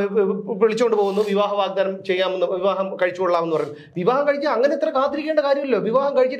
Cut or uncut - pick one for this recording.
uncut